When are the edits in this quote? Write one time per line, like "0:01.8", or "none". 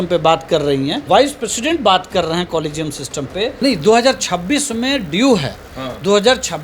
0:01.0
0:03.5